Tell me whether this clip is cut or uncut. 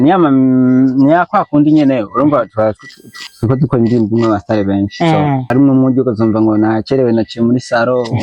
cut